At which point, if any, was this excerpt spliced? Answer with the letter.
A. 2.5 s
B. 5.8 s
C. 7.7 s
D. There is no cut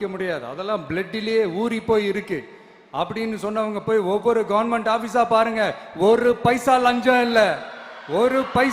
D